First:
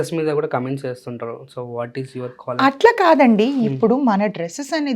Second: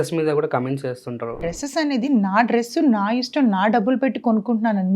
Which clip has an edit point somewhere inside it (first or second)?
second